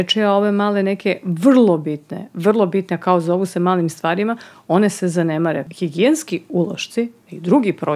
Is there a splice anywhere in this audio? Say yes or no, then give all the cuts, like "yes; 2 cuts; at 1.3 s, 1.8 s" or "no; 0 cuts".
yes; 1 cut; at 5.7 s